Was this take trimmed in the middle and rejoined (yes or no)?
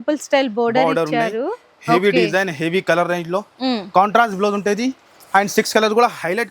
no